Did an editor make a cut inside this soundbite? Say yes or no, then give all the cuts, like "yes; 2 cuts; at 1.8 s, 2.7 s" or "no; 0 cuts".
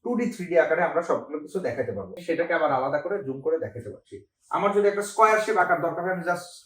yes; 1 cut; at 2.2 s